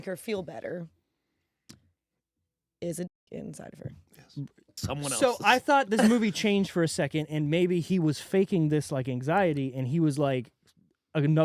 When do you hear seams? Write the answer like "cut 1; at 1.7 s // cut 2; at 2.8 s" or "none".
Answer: cut 1; at 4.7 s